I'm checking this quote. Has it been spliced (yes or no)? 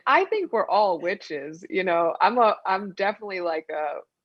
no